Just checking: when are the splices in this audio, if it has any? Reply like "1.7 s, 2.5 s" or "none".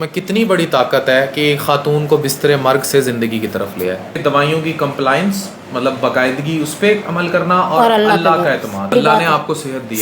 4.1 s, 8.9 s